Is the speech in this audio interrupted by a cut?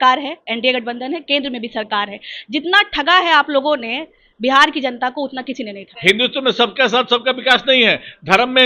yes; 1 cut; at 5.9 s

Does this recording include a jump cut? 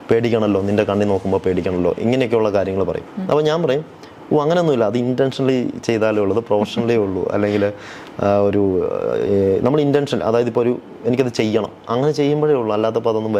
no; 0 cuts

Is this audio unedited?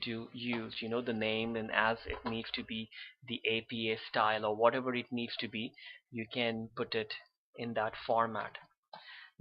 no; 1 cut; at 3.1 s

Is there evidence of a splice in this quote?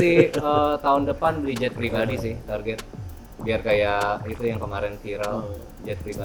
no; 0 cuts

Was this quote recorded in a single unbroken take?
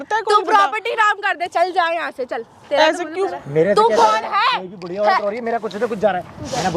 no; 1 cut; at 3.1 s

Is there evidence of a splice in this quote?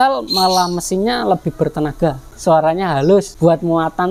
yes; 2 cuts; at 2.3 s, 3.3 s

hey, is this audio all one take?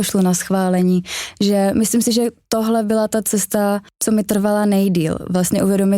no; 1 cut; at 3.9 s

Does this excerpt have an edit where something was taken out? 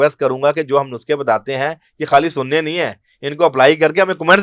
no; 0 cuts

